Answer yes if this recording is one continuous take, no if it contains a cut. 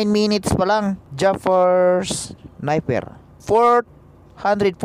no